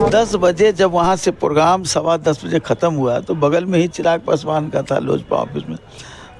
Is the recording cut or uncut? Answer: uncut